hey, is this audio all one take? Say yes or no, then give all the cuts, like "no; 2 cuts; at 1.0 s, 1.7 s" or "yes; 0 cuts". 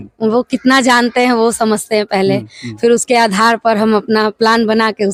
yes; 0 cuts